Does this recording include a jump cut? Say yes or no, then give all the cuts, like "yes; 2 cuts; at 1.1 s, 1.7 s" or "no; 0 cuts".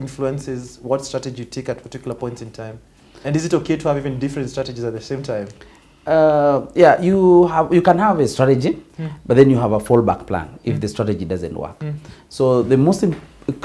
no; 0 cuts